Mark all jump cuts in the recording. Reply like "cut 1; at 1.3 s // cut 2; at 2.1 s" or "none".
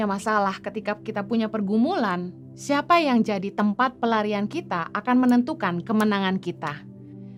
none